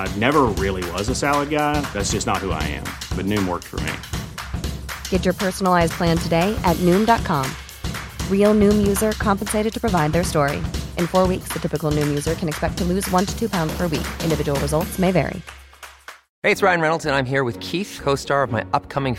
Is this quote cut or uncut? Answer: cut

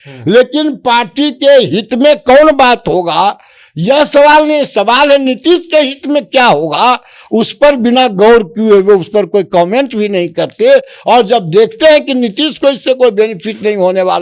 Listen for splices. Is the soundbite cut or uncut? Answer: uncut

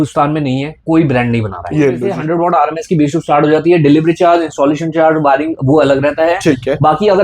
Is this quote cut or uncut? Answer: cut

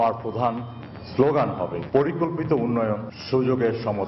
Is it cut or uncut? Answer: cut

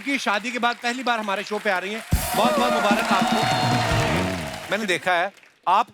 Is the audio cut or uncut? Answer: cut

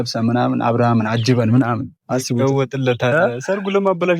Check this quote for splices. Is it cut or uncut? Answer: uncut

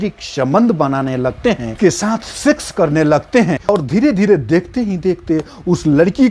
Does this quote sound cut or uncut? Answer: cut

